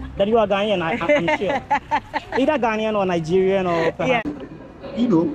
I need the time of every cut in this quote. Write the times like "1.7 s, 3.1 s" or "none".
4.4 s